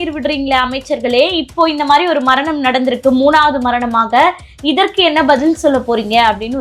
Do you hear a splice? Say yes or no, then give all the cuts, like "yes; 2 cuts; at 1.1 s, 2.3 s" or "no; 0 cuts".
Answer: no; 0 cuts